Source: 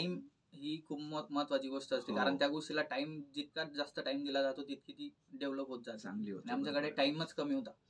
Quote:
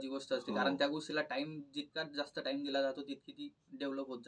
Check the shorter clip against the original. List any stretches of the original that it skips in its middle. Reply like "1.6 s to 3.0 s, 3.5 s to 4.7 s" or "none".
none